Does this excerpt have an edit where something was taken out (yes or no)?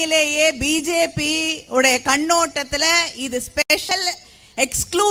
no